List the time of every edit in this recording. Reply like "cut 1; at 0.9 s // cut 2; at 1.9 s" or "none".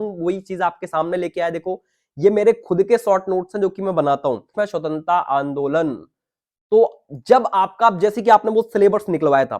cut 1; at 4.5 s